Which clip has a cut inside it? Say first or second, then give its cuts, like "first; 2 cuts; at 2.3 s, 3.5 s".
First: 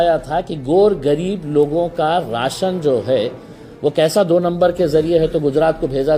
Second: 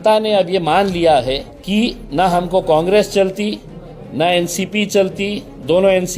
second; 1 cut; at 1.5 s